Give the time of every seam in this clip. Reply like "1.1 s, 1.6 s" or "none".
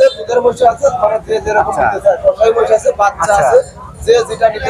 none